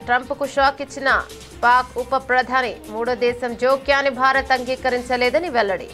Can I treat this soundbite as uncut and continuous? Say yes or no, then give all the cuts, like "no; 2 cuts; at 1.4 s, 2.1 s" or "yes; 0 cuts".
yes; 0 cuts